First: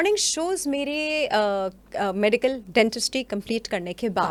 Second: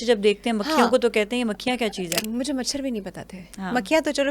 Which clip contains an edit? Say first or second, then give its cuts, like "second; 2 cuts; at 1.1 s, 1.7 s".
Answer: second; 1 cut; at 2.2 s